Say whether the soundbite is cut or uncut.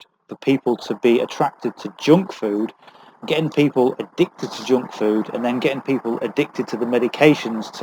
uncut